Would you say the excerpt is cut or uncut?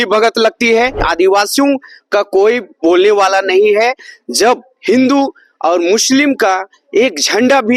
cut